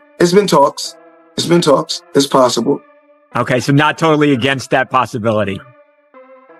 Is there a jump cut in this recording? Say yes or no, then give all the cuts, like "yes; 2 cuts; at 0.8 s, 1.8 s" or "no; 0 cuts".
no; 0 cuts